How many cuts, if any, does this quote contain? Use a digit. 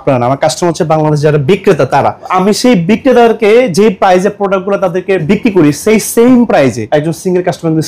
3